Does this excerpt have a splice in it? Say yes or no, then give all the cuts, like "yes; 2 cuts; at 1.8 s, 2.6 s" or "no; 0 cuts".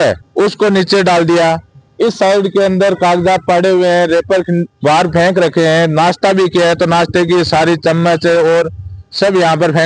no; 0 cuts